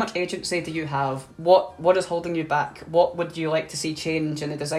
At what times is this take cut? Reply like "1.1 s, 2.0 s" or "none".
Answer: 1.2 s